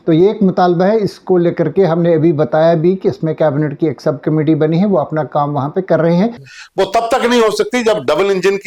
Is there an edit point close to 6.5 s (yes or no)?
yes